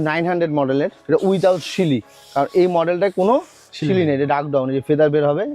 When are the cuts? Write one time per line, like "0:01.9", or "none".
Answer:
0:01.0